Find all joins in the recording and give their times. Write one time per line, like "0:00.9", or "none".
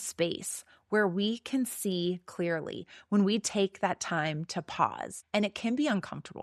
0:05.1